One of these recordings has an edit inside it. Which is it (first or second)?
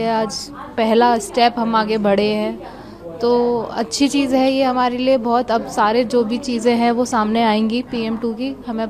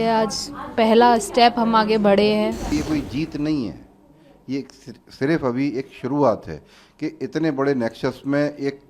second